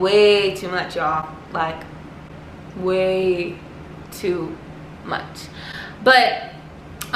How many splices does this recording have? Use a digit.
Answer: 0